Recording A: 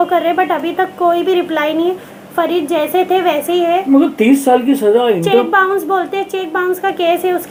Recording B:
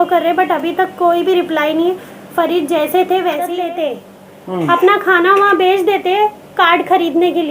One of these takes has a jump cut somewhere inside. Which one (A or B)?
B